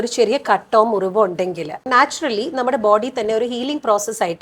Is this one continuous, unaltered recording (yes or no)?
no